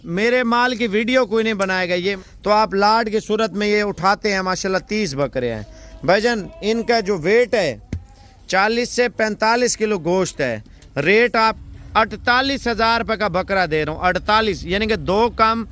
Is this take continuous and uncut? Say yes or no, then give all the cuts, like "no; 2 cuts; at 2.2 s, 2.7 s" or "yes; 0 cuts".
no; 2 cuts; at 2.2 s, 11.6 s